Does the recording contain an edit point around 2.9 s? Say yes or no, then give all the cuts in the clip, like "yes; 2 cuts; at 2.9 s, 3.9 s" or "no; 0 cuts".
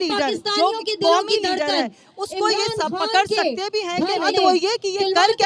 no; 1 cut; at 4.3 s